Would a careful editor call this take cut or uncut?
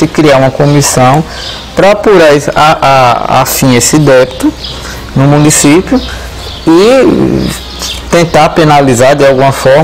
uncut